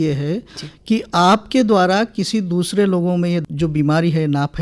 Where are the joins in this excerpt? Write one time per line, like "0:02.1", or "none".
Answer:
none

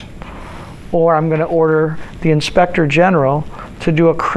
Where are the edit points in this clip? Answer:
0:02.0

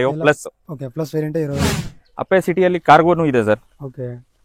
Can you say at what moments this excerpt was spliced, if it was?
0:01.7

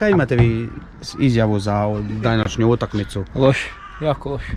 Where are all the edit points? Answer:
none

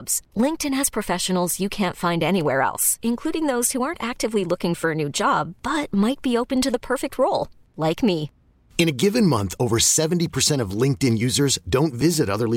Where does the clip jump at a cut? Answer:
none

